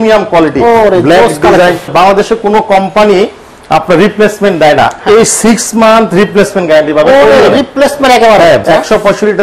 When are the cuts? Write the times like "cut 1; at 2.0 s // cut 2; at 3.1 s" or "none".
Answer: cut 1; at 1.9 s // cut 2; at 8.6 s

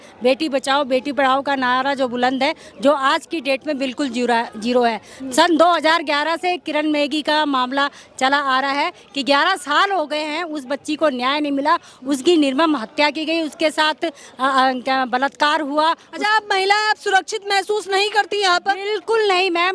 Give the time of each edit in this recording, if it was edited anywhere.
none

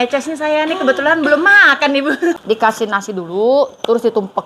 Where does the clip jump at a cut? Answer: cut 1; at 2.4 s

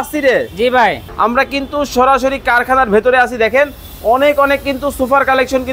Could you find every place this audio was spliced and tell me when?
cut 1; at 1.0 s

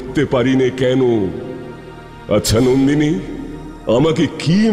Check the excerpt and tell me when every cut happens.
none

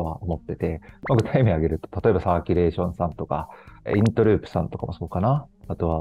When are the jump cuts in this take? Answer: none

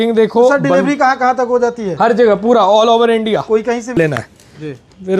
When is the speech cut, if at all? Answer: cut 1; at 4.0 s

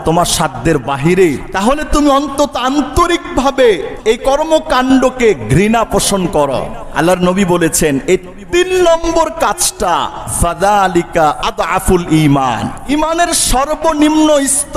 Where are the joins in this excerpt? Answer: cut 1; at 1.5 s // cut 2; at 3.9 s // cut 3; at 6.8 s // cut 4; at 12.9 s

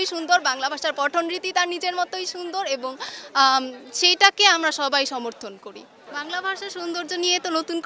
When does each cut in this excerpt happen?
none

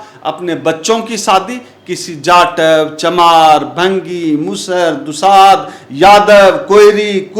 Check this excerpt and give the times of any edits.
none

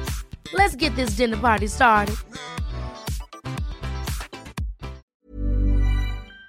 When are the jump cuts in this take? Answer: cut 1; at 5.1 s

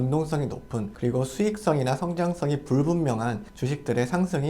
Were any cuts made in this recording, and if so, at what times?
cut 1; at 0.9 s // cut 2; at 3.5 s

